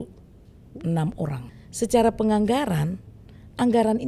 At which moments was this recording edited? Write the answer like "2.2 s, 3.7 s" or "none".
1.5 s